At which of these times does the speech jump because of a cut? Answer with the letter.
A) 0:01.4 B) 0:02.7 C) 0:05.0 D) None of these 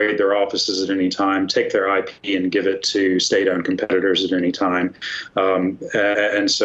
D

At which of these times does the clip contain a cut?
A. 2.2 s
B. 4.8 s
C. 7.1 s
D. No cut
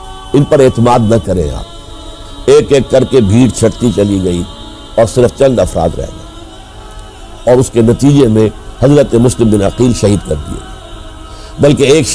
A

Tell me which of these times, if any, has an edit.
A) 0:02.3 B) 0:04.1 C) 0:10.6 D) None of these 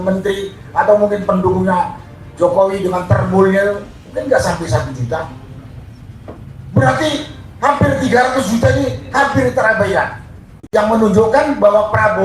C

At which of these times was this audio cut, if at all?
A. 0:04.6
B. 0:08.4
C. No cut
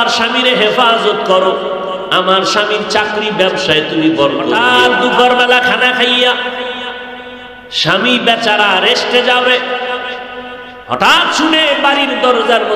A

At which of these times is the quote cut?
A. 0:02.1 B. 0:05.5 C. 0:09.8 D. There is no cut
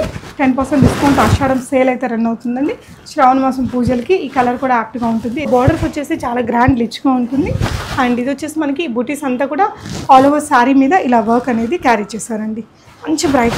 B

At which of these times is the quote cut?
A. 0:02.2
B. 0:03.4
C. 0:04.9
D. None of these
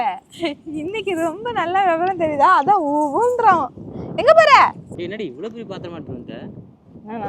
C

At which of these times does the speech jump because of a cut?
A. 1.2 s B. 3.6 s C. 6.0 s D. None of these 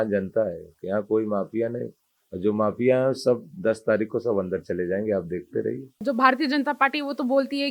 C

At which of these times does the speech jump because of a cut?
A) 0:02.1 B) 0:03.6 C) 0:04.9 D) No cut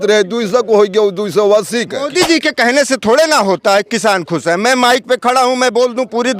A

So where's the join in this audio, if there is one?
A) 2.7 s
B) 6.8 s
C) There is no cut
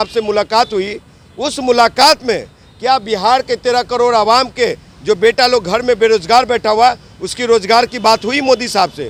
C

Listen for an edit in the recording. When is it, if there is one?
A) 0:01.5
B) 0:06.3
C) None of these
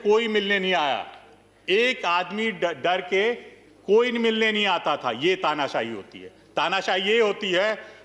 C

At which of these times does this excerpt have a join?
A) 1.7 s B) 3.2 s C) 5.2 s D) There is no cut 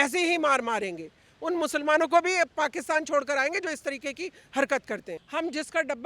C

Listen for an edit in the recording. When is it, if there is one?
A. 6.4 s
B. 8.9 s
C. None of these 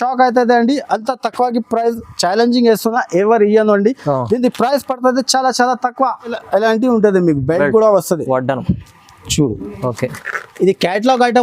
A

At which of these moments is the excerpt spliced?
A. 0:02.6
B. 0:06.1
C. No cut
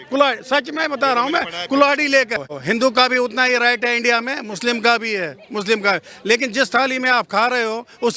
A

